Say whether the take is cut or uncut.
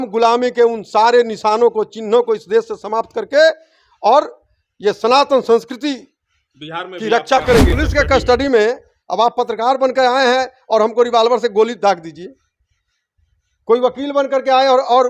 cut